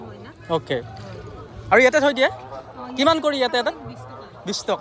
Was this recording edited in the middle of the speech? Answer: no; 0 cuts

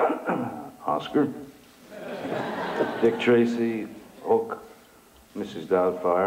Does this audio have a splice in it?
no; 0 cuts

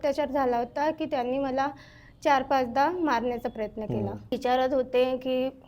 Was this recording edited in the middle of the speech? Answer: yes; 1 cut; at 4.3 s

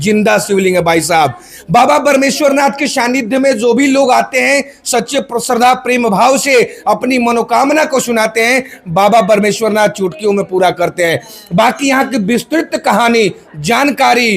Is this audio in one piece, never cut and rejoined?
yes; 0 cuts

